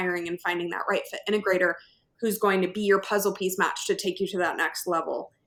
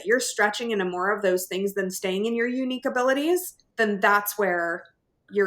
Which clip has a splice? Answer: second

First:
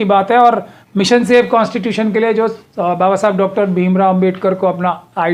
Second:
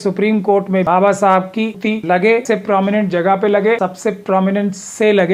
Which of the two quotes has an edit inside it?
second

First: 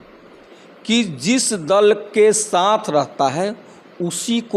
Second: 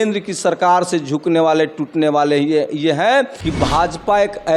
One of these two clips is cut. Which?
second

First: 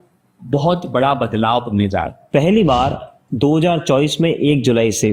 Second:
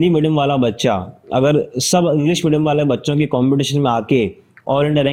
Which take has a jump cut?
first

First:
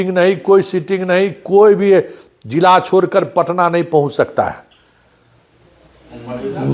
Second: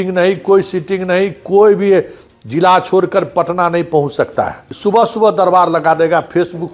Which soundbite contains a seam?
second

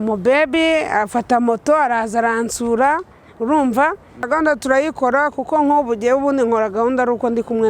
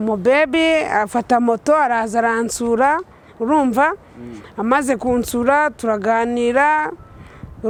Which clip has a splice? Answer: first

